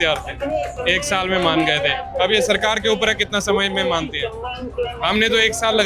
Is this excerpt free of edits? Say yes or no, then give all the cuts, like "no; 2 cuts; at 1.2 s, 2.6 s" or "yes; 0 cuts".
yes; 0 cuts